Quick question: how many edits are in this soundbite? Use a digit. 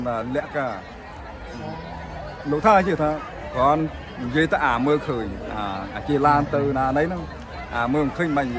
0